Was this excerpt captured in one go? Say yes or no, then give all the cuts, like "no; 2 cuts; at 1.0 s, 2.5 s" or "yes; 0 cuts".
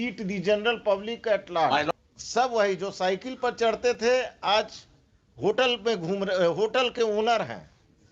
no; 1 cut; at 1.9 s